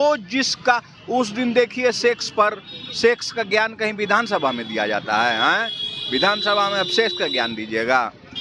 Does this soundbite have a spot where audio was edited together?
no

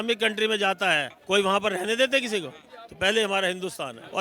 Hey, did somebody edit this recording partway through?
no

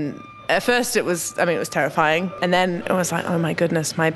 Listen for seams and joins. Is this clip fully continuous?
no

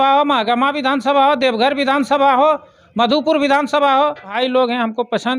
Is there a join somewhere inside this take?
yes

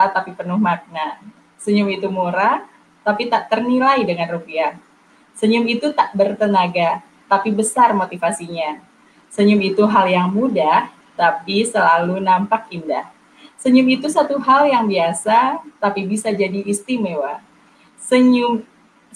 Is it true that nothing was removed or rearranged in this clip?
yes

